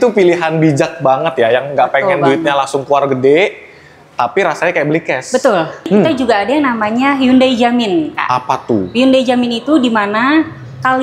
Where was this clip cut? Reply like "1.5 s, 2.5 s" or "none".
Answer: 5.9 s